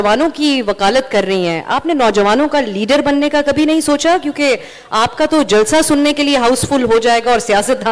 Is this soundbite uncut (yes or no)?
yes